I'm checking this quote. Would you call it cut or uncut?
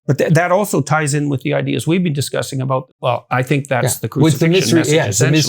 cut